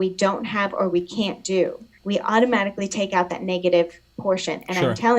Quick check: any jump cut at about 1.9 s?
yes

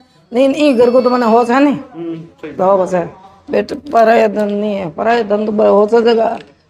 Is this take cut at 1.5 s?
no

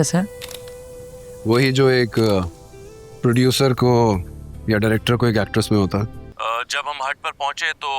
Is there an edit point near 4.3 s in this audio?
no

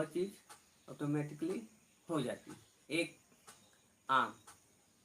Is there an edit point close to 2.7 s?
yes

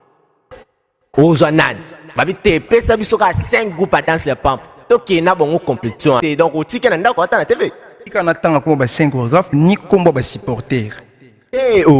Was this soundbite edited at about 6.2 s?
yes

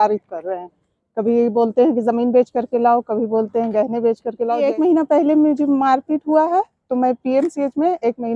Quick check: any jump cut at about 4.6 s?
yes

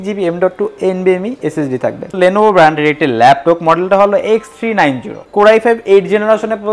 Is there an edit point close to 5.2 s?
yes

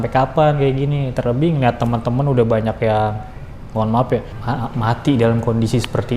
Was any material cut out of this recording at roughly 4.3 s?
yes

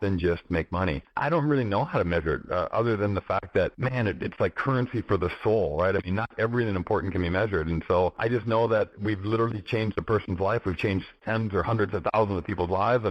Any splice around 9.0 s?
yes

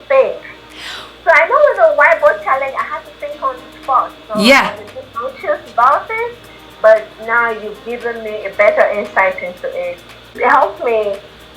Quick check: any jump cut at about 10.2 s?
yes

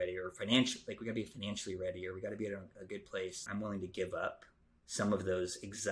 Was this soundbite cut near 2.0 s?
no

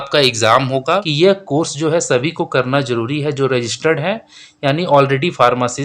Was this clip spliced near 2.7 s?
no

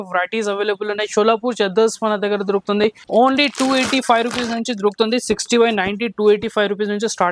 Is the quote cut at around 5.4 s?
no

